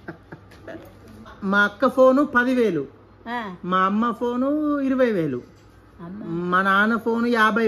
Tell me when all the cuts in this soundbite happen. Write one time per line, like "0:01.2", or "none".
0:01.4